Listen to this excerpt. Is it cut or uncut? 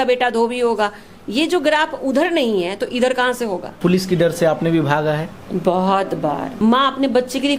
cut